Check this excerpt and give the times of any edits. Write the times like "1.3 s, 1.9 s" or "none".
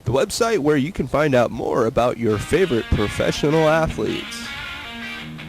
4.2 s